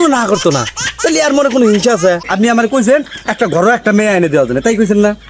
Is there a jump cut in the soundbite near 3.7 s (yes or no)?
no